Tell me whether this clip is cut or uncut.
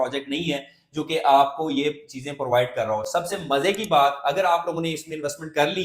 uncut